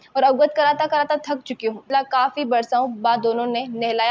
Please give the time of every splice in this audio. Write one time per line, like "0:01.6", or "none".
0:01.9